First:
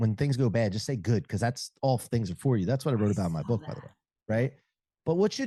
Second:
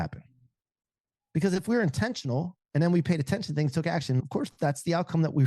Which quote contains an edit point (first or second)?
second